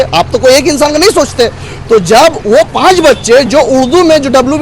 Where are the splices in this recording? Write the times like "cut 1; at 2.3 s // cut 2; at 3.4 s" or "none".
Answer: none